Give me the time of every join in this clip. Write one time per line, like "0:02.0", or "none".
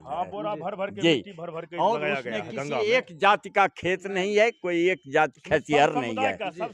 none